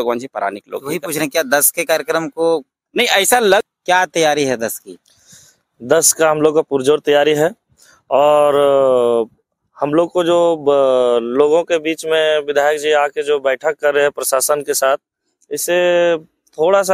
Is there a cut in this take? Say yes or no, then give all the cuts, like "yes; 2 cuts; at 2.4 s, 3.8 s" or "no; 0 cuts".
yes; 1 cut; at 3.6 s